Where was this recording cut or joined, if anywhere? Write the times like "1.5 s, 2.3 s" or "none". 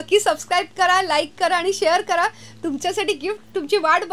none